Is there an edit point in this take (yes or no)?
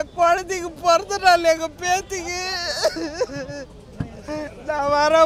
no